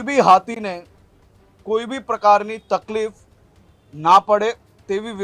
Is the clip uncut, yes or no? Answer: yes